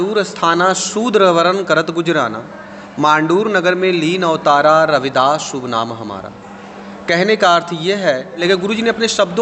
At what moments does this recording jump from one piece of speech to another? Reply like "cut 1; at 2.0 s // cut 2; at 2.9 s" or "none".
cut 1; at 8.4 s